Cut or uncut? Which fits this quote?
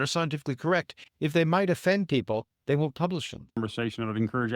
cut